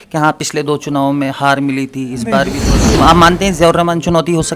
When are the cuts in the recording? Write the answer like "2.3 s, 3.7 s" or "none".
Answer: 2.9 s